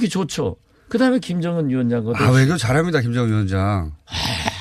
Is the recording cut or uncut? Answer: cut